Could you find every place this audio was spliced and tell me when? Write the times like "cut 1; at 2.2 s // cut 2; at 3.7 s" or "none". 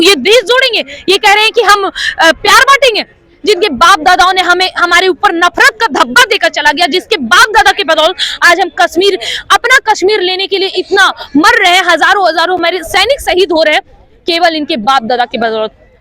none